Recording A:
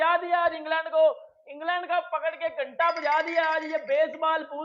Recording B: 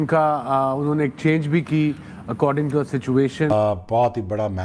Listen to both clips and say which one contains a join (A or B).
B